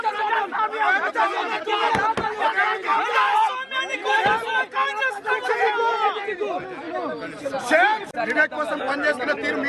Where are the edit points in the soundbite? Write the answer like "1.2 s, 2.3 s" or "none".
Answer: 8.1 s

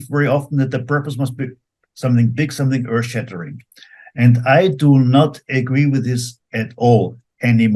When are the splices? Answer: none

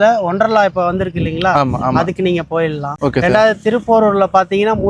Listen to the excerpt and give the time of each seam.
none

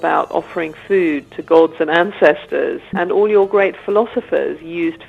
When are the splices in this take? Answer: 3.0 s

